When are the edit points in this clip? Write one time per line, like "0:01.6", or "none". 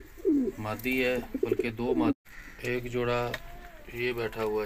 0:02.1